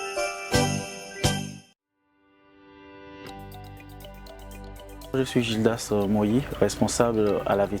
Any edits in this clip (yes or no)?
yes